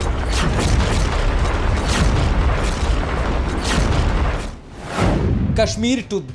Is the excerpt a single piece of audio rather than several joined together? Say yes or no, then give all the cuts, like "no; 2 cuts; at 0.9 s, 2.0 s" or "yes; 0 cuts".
yes; 0 cuts